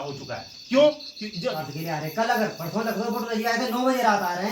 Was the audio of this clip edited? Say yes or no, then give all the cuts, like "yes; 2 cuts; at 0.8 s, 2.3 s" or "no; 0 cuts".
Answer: yes; 1 cut; at 1.3 s